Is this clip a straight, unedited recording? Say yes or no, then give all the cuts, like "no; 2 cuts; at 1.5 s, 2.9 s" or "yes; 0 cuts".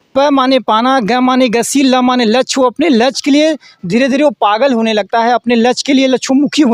yes; 0 cuts